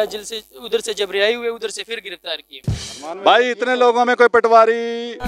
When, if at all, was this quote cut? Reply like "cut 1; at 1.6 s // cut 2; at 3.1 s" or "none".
cut 1; at 2.9 s